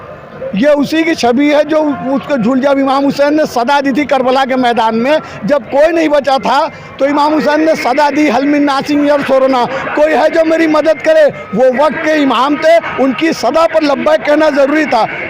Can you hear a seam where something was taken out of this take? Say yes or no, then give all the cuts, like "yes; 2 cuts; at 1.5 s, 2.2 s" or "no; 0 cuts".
no; 0 cuts